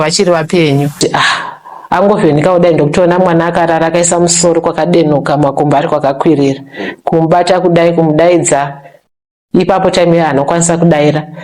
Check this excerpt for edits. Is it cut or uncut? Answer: cut